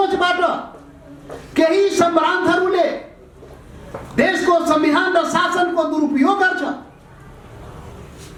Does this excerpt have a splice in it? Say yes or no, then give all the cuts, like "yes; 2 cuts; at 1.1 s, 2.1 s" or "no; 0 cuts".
no; 0 cuts